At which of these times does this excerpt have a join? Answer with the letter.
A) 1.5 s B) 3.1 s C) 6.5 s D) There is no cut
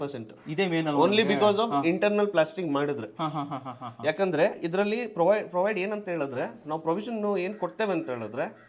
D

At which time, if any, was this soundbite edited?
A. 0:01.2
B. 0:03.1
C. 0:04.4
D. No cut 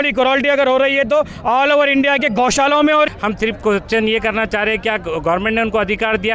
B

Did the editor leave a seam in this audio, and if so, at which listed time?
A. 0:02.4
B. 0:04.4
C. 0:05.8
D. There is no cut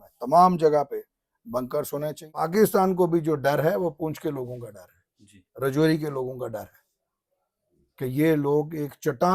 A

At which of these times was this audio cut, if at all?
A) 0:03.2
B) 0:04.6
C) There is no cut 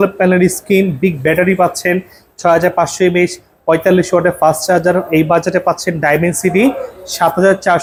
C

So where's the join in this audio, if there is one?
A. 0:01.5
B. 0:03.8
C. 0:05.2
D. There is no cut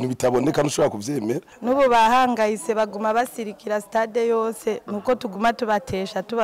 A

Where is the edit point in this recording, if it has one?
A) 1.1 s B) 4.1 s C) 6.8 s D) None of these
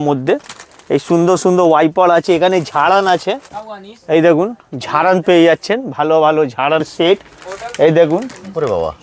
C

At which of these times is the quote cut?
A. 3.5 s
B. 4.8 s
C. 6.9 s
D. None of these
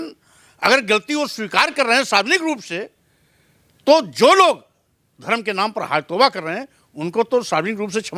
D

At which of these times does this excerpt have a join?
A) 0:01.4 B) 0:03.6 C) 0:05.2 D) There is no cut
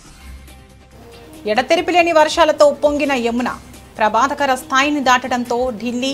A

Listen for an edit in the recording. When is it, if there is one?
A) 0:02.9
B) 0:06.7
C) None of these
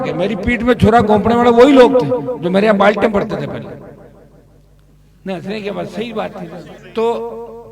C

